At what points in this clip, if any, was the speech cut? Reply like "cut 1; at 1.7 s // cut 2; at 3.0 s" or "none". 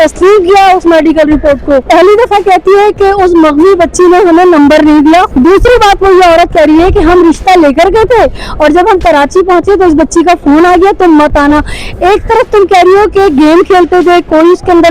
cut 1; at 1.8 s // cut 2; at 5.3 s